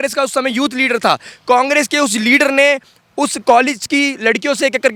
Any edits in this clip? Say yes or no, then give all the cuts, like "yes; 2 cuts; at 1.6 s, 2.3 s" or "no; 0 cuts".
no; 0 cuts